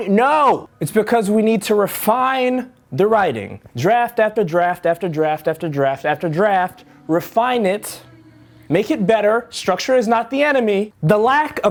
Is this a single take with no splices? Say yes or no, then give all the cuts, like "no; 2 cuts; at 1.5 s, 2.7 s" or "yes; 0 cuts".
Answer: yes; 0 cuts